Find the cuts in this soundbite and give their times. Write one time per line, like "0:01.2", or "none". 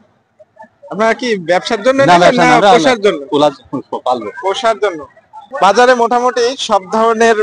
0:05.5